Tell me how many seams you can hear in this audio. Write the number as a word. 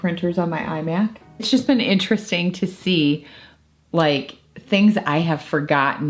one